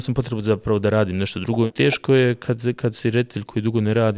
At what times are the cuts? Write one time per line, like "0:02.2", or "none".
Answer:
0:01.7